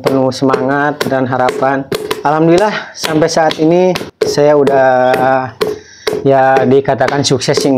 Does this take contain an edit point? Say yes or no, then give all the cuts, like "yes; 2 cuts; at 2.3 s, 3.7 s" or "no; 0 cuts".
yes; 2 cuts; at 2.1 s, 4.1 s